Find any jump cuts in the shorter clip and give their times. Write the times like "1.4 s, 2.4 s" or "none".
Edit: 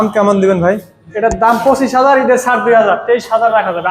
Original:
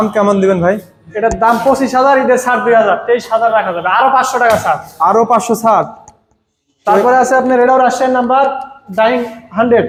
none